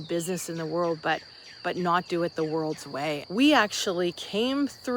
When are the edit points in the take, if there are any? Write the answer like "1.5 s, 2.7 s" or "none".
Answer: 3.2 s